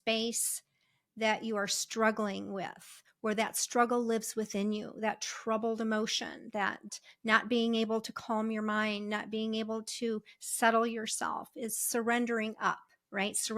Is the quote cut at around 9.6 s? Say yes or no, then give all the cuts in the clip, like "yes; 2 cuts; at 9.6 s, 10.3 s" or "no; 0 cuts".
no; 1 cut; at 6.8 s